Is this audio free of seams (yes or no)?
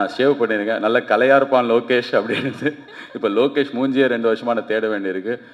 yes